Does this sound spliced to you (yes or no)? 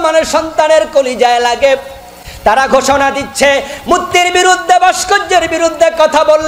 no